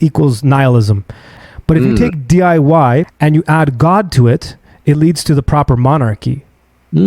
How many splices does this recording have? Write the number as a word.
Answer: two